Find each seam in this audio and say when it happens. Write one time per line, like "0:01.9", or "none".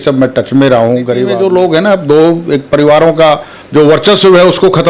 0:01.3